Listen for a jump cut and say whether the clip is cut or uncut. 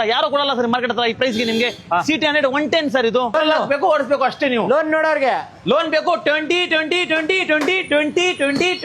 cut